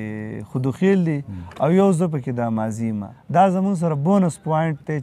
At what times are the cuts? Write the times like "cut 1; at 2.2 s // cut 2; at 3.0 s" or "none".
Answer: cut 1; at 3.1 s